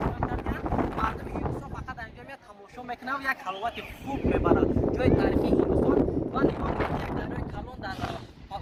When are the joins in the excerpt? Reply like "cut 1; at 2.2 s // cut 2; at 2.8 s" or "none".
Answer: none